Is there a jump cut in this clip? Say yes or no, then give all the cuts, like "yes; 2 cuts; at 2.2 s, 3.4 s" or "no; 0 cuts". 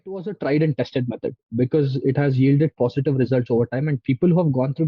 no; 0 cuts